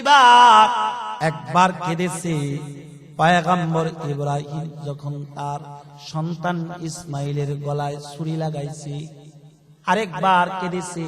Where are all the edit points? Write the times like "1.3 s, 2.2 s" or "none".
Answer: 1.1 s